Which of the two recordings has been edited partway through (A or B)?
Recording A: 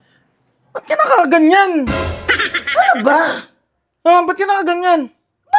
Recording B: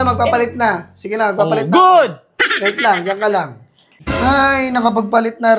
B